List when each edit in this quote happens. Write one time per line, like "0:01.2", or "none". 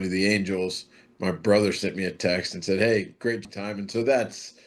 0:03.4